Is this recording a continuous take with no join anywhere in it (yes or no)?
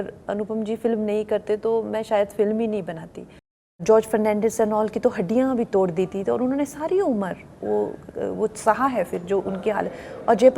no